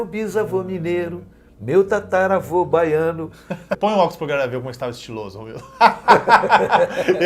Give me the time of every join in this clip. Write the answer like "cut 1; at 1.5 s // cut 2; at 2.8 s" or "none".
cut 1; at 3.7 s